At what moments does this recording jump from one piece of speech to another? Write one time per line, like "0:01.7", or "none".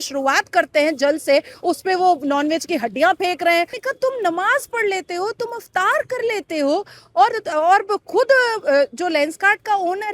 0:03.8